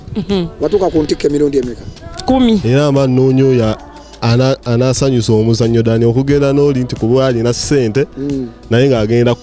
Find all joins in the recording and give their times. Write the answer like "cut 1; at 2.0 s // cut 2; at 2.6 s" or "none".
cut 1; at 2.6 s